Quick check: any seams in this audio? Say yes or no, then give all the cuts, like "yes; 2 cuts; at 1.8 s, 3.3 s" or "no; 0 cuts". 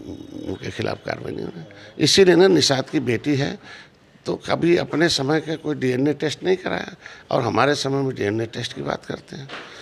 no; 0 cuts